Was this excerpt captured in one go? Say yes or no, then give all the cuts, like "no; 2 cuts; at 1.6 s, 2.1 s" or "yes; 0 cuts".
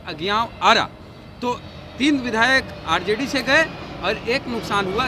yes; 0 cuts